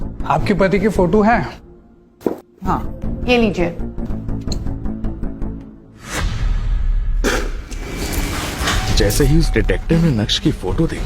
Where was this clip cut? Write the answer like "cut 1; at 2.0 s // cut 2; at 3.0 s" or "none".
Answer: cut 1; at 3.0 s // cut 2; at 4.1 s